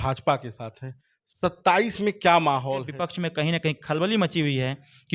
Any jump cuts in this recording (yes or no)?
yes